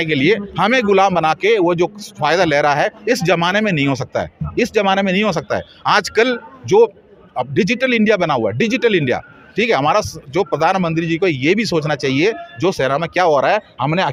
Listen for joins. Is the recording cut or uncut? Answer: uncut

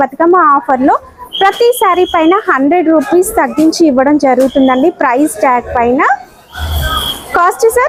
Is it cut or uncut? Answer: uncut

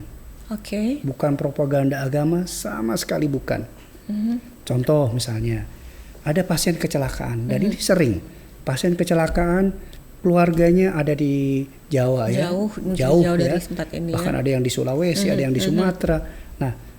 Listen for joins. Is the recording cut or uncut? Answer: uncut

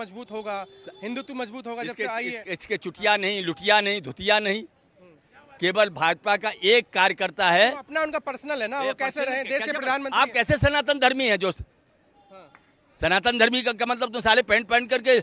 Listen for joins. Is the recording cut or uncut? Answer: uncut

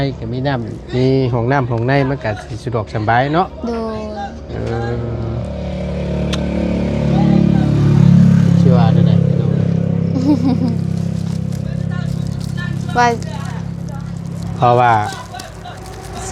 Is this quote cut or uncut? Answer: uncut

